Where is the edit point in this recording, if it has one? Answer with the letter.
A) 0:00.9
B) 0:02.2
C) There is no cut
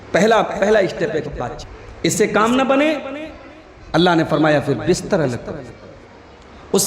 B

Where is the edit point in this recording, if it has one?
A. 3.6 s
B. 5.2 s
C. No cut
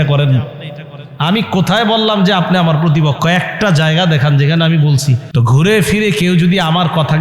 B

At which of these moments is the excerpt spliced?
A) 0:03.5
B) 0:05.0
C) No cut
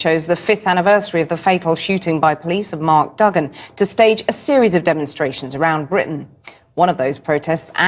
B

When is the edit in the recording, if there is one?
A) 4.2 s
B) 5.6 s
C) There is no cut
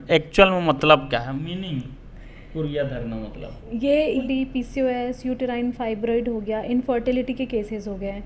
A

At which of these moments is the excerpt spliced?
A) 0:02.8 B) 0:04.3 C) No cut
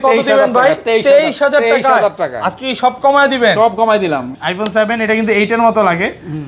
B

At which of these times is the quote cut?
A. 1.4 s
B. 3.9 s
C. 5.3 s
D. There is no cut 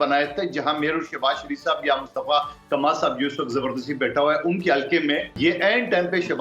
C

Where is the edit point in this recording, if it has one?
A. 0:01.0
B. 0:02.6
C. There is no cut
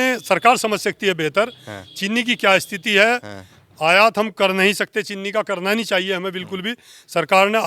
C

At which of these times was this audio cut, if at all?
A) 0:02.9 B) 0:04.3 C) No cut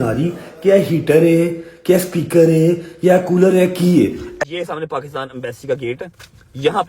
B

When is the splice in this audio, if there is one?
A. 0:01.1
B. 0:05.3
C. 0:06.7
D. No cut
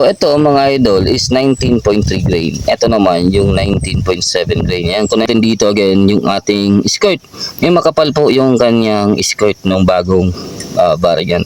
B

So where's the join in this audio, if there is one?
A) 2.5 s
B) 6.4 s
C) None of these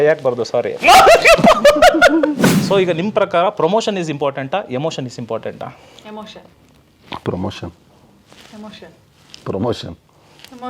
A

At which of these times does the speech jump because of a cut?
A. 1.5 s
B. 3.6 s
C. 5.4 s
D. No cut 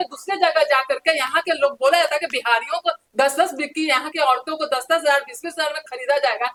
D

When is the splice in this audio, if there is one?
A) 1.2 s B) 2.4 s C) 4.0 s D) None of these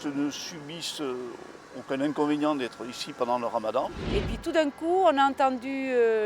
C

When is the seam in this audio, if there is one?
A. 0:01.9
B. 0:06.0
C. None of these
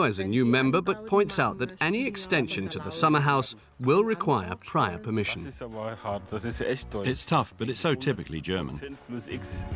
A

